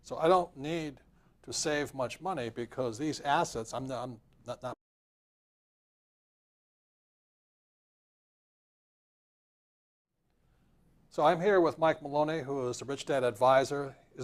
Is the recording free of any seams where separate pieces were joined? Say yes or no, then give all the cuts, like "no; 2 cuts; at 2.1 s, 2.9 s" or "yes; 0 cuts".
yes; 0 cuts